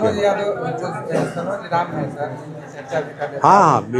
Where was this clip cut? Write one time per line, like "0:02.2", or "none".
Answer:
none